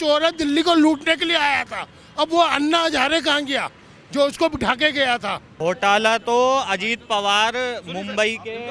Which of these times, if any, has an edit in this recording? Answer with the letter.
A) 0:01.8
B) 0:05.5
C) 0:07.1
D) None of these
B